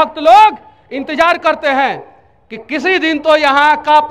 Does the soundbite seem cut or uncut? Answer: uncut